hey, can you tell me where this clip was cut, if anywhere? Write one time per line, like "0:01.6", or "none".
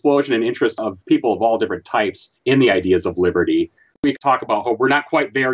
0:00.8
0:02.3
0:04.0